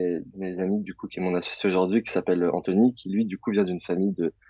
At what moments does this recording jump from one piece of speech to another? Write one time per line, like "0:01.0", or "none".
none